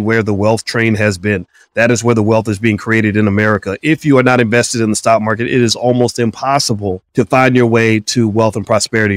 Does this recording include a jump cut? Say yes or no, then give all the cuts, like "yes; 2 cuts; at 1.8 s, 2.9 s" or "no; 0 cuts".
yes; 1 cut; at 7.0 s